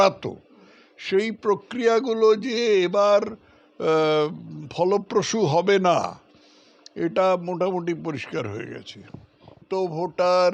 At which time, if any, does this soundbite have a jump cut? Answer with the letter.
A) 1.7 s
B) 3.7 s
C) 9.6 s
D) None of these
C